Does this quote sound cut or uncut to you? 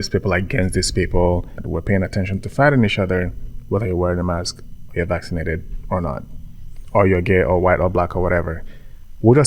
cut